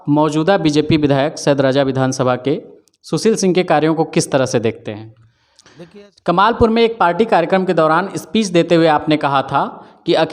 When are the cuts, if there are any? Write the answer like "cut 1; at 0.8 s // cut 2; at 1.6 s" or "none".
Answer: cut 1; at 5.7 s